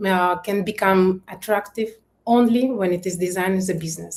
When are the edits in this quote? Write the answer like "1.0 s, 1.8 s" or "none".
none